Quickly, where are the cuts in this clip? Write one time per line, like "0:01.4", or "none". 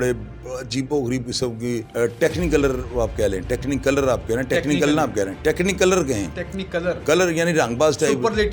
0:01.9